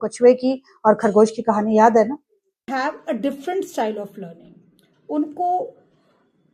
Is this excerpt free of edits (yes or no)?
no